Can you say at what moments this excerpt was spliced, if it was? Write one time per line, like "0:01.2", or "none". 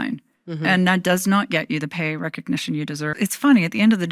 0:03.1